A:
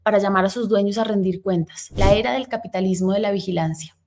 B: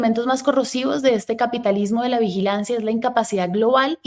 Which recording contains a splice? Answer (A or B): A